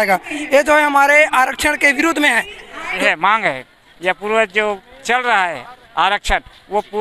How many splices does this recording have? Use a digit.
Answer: 1